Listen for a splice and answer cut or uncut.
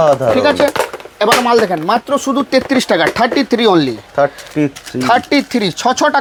uncut